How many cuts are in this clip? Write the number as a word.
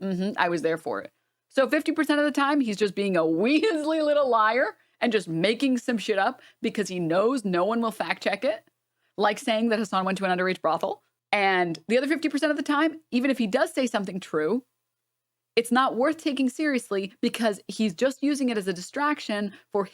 one